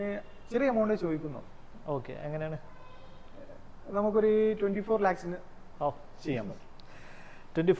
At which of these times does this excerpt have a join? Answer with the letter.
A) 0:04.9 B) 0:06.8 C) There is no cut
C